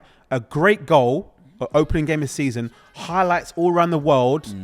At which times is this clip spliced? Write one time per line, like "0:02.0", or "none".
none